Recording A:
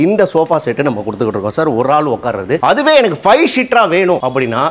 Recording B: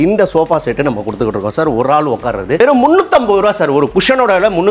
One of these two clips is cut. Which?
B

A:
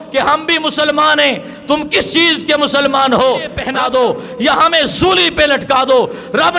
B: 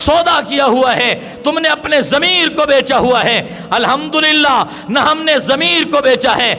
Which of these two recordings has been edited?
A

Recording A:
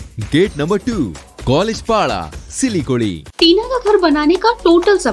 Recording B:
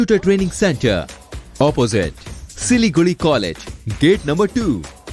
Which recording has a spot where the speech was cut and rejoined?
A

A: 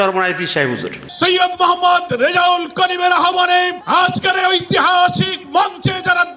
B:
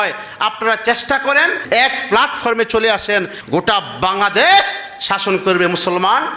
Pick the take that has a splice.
B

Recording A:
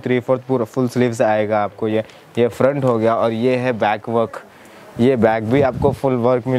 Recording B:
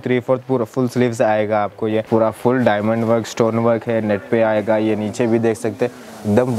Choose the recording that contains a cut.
B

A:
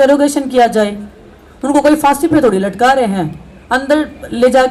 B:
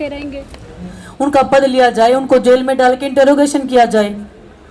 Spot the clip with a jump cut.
B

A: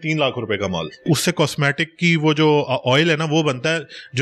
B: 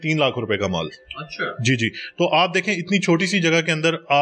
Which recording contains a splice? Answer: A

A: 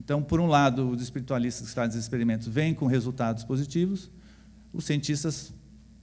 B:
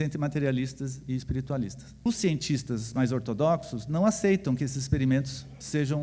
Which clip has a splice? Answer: B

